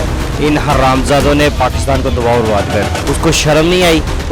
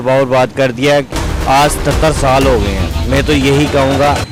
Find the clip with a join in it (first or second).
first